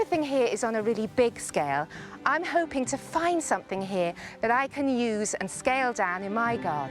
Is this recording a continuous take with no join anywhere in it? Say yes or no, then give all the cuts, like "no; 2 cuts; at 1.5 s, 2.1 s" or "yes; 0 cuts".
yes; 0 cuts